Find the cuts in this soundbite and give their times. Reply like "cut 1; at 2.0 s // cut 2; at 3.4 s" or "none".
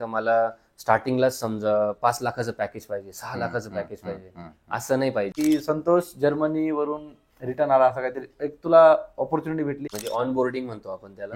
cut 1; at 5.3 s // cut 2; at 9.9 s